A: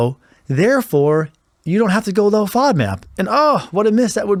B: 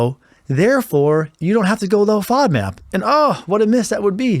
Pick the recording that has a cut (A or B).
B